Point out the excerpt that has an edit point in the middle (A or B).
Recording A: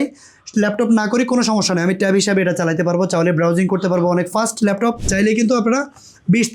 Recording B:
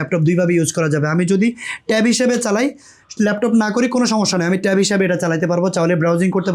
A